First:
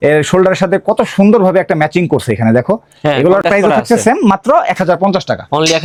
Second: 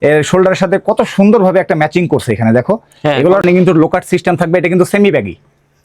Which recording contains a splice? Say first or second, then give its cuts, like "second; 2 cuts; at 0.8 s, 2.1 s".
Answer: second; 1 cut; at 3.4 s